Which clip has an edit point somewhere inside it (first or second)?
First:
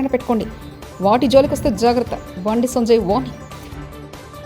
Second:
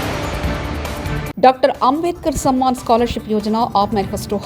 second